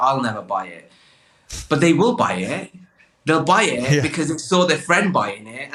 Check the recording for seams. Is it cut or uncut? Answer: uncut